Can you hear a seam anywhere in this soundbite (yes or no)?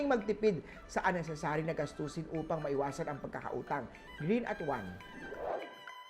yes